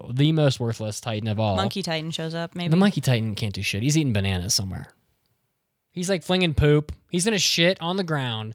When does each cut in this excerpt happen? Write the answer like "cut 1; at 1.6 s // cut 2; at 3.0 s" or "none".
cut 1; at 1.6 s